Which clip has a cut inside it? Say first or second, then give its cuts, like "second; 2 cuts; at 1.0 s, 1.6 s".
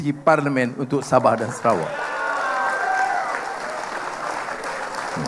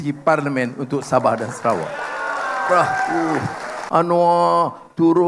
second; 1 cut; at 3.3 s